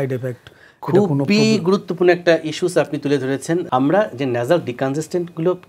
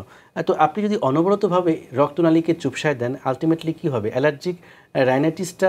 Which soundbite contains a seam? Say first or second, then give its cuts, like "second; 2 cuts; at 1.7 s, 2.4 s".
first; 1 cut; at 3.7 s